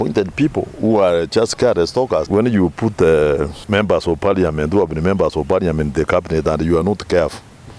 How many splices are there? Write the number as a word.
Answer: two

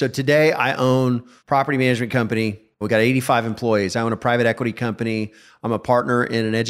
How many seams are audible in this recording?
two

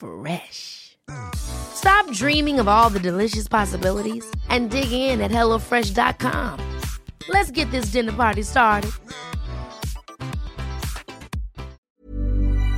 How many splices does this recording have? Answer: one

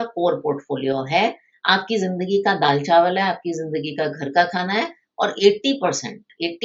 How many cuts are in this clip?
zero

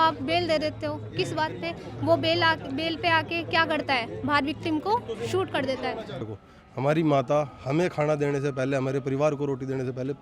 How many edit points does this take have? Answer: one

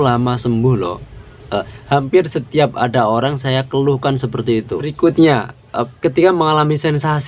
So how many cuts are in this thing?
one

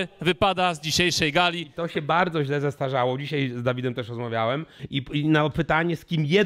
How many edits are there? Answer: two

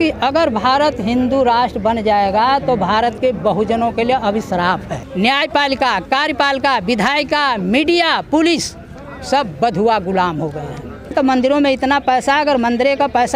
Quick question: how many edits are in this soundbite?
two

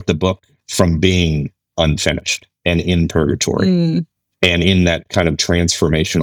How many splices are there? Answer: zero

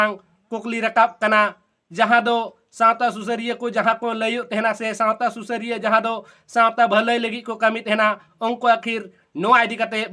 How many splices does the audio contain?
zero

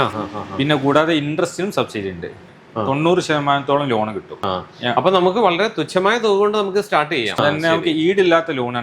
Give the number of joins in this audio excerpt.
three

